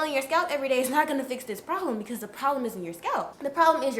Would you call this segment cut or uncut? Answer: uncut